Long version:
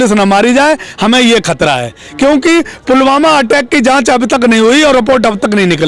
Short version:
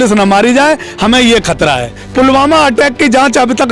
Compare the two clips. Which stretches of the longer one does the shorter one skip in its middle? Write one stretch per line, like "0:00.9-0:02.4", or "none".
0:02.0-0:02.7